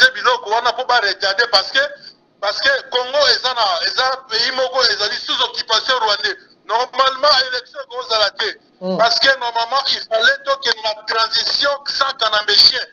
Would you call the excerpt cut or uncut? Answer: cut